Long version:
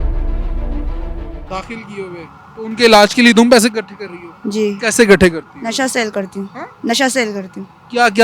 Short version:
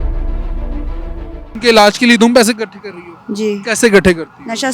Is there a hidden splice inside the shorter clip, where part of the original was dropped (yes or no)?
yes